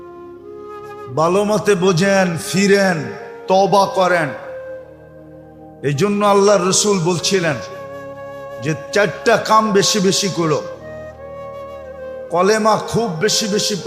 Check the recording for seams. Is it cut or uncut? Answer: cut